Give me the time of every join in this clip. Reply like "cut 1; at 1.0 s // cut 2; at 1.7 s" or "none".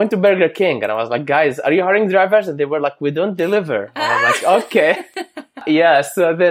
cut 1; at 5.6 s